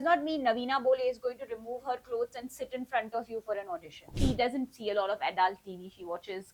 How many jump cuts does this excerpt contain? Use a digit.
1